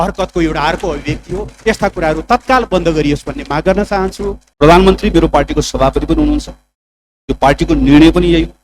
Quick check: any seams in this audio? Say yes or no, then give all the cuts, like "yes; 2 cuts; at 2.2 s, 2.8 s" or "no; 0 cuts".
yes; 1 cut; at 4.4 s